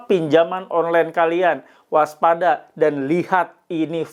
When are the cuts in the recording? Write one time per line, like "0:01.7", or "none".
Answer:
none